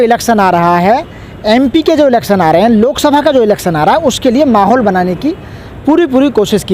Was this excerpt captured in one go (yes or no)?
yes